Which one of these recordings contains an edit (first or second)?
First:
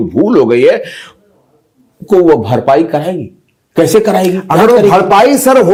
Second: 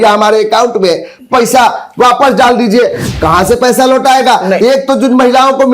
second